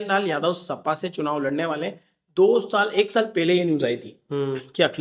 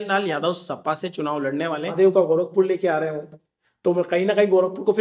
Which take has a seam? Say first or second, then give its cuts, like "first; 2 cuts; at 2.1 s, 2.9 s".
second; 1 cut; at 1.6 s